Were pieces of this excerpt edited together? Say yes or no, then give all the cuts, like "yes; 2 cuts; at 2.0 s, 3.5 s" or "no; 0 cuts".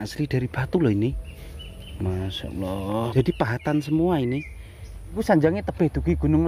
yes; 2 cuts; at 3.1 s, 5.2 s